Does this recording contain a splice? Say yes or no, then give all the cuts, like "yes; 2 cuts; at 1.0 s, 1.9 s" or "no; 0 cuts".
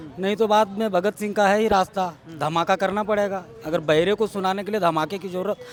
no; 0 cuts